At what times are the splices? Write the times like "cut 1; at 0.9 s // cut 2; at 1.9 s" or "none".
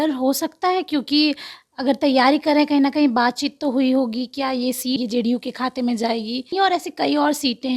cut 1; at 5.0 s // cut 2; at 6.5 s